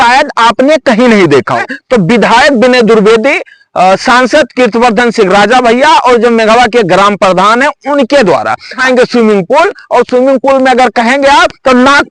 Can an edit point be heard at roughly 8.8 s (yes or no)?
yes